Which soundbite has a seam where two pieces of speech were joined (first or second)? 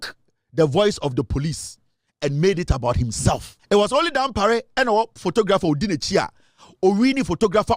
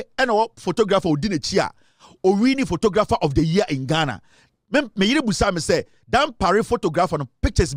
first